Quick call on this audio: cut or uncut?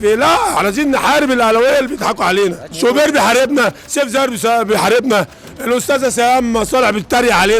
cut